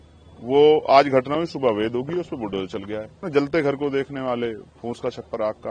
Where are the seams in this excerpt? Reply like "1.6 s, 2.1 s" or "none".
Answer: 3.2 s